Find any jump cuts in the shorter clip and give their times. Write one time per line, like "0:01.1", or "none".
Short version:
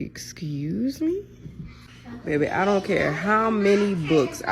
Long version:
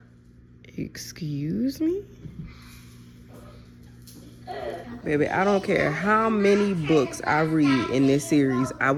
0:02.1